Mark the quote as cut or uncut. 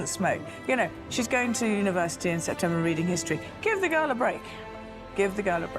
uncut